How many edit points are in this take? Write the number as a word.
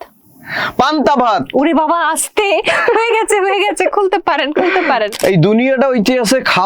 one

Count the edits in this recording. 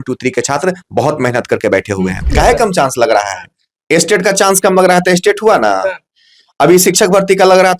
one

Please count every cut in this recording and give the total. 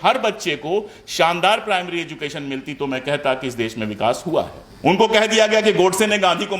one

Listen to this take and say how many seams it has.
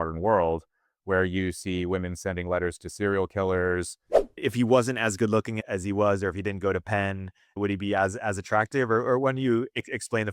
three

